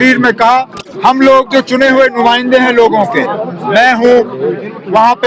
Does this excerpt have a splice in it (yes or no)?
yes